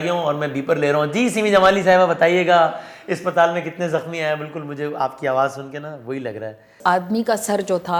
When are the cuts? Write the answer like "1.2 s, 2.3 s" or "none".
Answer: 6.7 s